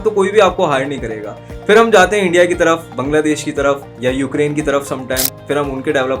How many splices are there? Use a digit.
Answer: 2